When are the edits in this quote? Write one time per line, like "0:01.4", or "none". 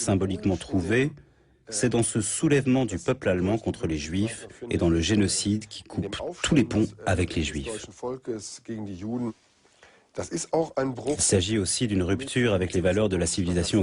0:07.5

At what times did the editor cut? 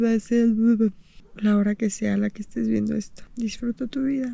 0:03.2

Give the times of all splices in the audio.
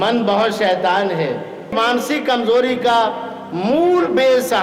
0:01.7

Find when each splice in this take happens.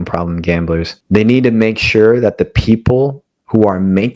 0:01.0

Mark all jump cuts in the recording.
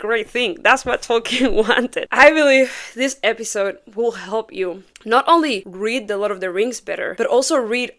0:02.1
0:05.7
0:07.1

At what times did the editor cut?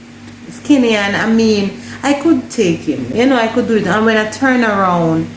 0:03.1

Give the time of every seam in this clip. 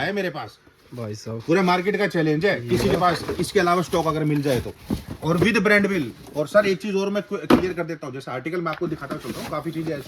none

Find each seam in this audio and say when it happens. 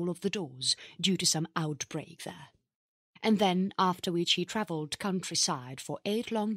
none

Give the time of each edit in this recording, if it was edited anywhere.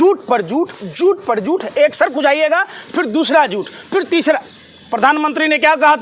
none

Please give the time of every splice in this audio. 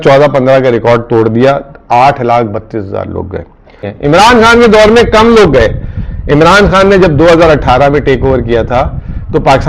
0:03.9

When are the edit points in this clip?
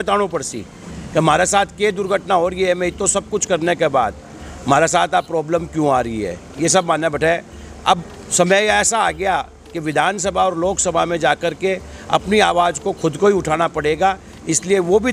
none

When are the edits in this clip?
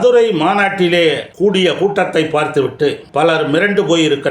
0:01.3
0:03.0

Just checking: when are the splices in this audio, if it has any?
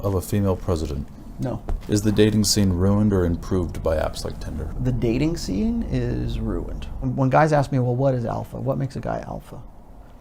0:01.7
0:04.8
0:07.1

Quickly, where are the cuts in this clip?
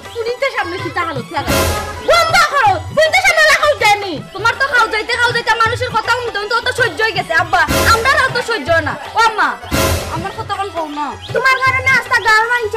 none

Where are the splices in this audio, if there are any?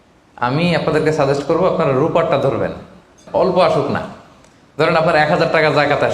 0:03.2

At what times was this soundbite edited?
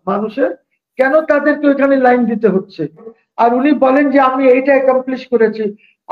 0:03.2

